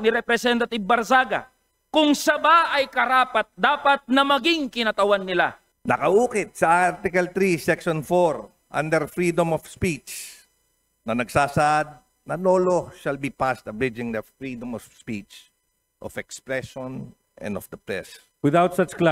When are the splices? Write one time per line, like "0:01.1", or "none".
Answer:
0:05.7
0:18.2